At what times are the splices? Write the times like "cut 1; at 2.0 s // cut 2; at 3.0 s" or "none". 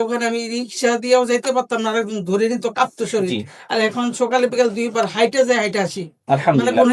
none